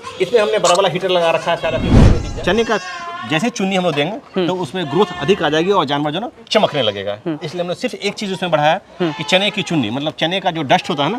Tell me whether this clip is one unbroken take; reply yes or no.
no